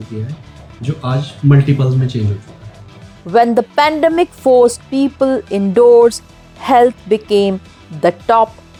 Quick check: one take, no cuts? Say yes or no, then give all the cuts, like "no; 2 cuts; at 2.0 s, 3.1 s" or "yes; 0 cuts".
yes; 0 cuts